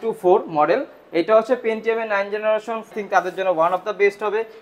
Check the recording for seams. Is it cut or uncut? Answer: cut